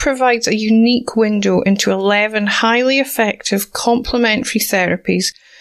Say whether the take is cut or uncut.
uncut